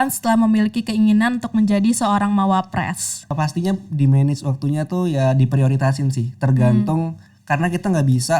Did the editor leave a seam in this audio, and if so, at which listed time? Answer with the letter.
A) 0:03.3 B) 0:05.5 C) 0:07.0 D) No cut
A